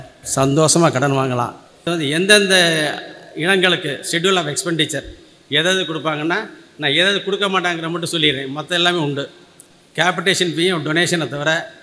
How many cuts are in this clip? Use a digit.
1